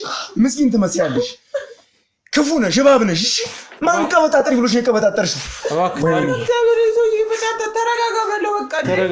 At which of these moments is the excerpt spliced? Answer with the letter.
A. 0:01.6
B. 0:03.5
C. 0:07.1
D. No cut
D